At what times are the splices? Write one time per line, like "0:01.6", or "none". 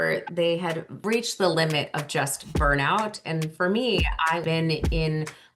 0:00.9
0:04.4